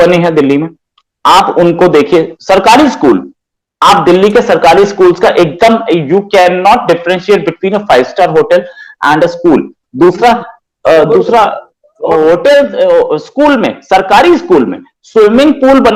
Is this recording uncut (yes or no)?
yes